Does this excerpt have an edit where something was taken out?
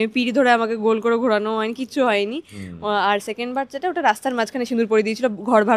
no; 0 cuts

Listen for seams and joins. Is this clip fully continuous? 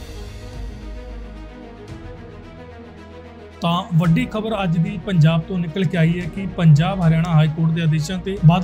no; 1 cut; at 1.2 s

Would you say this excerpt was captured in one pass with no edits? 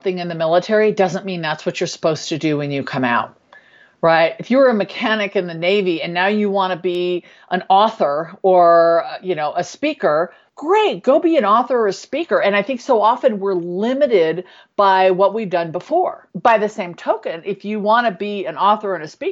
no; 2 cuts; at 10.5 s, 16.2 s

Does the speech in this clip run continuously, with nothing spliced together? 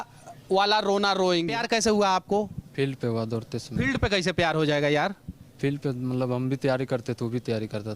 no; 1 cut; at 1.5 s

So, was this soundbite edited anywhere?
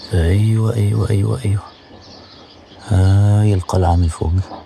no; 0 cuts

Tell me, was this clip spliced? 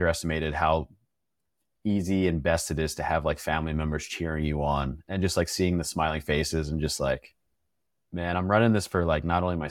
no; 0 cuts

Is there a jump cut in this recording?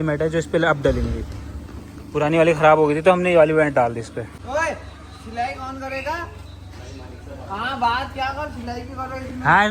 no; 0 cuts

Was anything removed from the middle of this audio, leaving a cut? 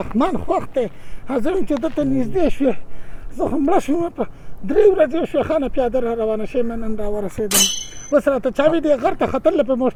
no; 0 cuts

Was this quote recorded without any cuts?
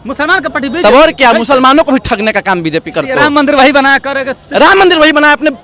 no; 1 cut; at 3.1 s

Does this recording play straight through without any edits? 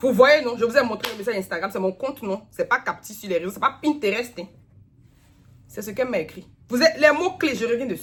yes; 0 cuts

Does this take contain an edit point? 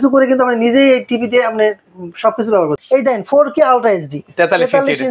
yes; 1 cut; at 2.8 s

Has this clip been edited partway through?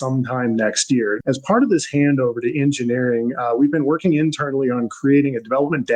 yes; 1 cut; at 1.2 s

